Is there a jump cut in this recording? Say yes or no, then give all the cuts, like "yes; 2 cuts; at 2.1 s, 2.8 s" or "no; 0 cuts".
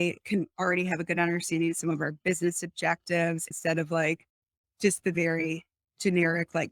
yes; 1 cut; at 3.5 s